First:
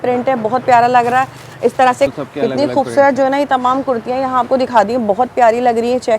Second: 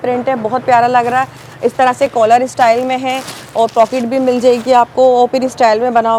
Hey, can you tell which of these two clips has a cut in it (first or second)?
first